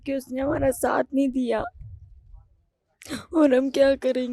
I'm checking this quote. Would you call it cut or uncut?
uncut